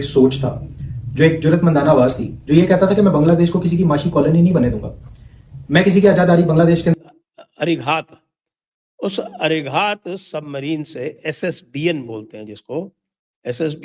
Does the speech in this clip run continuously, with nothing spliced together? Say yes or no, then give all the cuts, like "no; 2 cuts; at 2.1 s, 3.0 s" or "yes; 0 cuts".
no; 1 cut; at 6.9 s